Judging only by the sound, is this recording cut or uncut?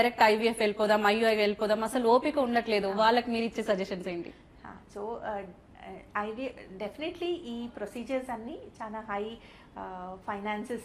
uncut